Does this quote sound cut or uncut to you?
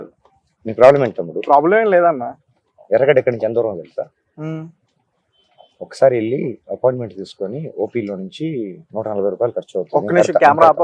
uncut